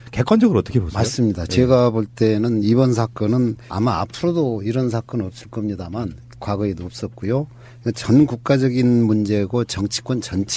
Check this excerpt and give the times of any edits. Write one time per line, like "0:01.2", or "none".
0:08.4